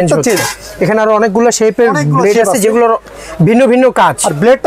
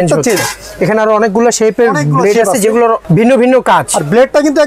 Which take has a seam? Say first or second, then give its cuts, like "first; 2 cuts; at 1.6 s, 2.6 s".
second; 1 cut; at 3.0 s